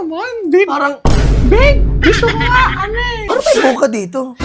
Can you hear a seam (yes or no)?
yes